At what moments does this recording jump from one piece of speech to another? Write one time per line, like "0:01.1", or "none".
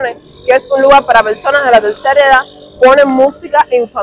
none